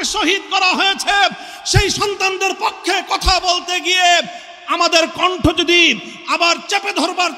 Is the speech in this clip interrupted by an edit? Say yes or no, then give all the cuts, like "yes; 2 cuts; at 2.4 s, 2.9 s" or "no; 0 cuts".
no; 0 cuts